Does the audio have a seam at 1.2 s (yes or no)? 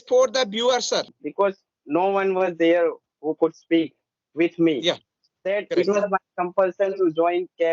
yes